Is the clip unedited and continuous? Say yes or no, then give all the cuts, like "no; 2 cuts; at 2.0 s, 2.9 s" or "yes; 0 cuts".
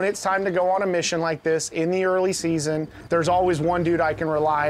no; 1 cut; at 2.9 s